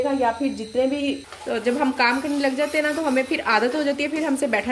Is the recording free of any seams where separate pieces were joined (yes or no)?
no